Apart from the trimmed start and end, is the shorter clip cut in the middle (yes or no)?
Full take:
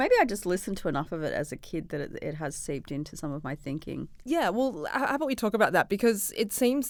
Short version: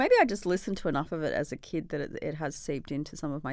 no